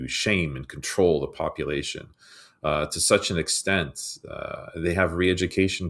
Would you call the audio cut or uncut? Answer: uncut